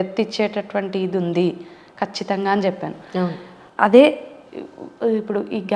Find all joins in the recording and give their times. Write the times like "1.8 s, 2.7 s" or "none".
none

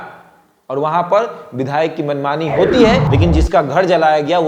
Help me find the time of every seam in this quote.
3.1 s

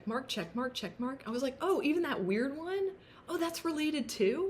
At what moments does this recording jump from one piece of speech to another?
none

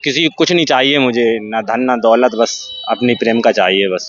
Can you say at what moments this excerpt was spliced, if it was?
none

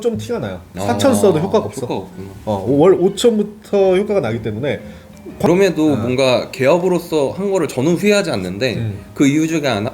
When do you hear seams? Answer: 5.5 s

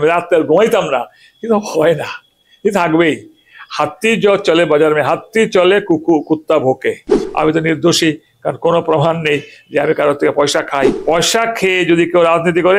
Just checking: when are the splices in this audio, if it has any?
7.2 s, 11.0 s

